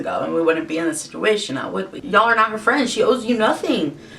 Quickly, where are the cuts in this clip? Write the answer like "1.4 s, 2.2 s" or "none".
2.0 s